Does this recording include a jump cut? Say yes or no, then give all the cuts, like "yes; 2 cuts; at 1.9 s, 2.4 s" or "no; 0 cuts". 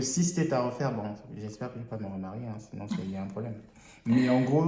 no; 0 cuts